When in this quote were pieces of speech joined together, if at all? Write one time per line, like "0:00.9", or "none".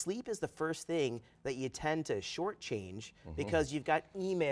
none